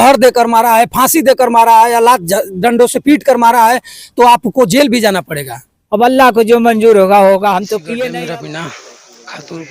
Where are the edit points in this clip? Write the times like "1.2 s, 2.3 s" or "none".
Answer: 7.9 s